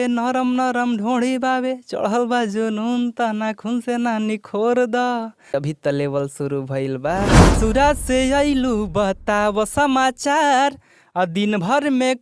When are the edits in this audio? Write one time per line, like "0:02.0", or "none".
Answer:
0:05.5
0:07.6